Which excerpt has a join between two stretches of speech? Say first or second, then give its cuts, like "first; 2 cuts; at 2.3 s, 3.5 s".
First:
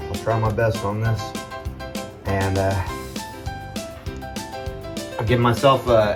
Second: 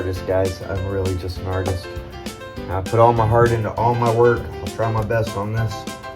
second; 1 cut; at 1.3 s